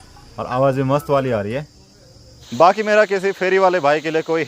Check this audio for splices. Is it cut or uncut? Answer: cut